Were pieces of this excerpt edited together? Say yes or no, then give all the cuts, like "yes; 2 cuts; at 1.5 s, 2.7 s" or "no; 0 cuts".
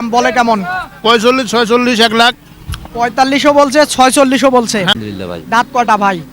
yes; 1 cut; at 4.9 s